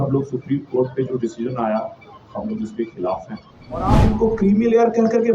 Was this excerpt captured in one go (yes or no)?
no